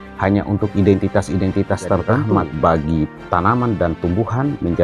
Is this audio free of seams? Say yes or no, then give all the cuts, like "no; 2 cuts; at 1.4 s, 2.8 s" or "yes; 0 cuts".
no; 1 cut; at 2.3 s